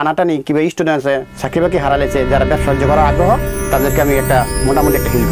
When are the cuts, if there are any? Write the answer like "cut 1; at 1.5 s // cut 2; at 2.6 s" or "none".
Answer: none

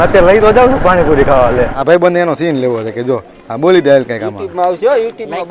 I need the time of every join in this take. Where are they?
cut 1; at 1.6 s

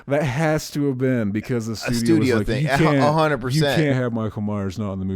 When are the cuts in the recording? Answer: cut 1; at 3.9 s

